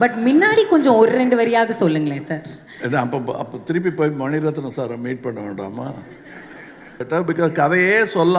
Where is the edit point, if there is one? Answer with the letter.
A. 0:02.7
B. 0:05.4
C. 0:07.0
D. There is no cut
C